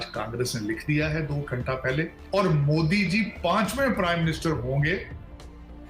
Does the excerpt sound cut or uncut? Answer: cut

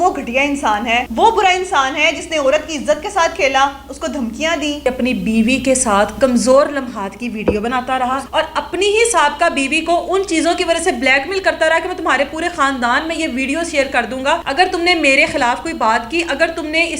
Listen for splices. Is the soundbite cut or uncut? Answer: cut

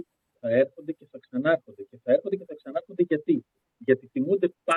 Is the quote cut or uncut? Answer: uncut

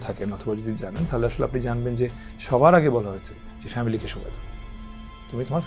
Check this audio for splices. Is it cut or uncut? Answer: uncut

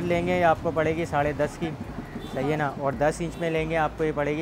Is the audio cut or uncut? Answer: uncut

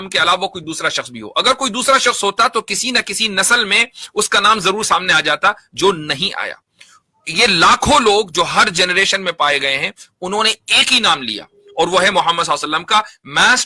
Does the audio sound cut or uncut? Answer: uncut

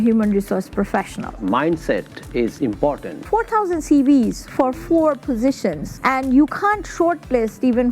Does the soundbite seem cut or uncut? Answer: cut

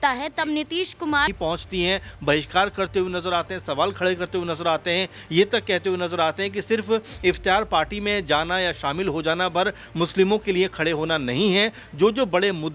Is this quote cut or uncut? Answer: cut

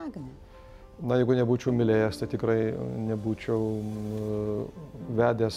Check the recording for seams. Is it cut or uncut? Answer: uncut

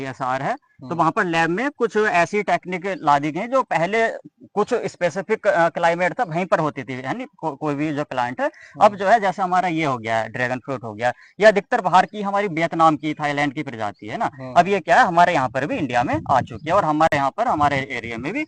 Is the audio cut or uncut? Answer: uncut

